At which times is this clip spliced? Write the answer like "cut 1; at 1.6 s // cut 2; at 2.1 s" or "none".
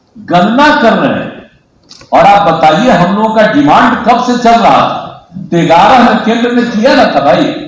none